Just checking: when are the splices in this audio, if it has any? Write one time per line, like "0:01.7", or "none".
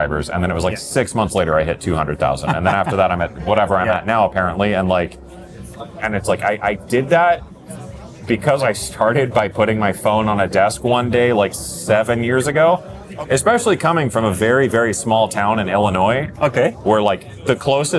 0:05.1
0:13.0